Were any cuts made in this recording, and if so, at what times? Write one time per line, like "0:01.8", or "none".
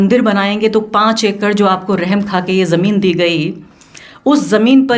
none